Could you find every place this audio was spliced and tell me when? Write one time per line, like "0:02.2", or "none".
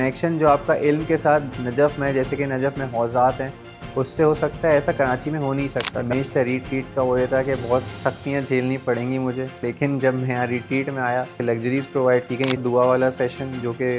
0:06.0
0:09.6
0:11.3
0:12.6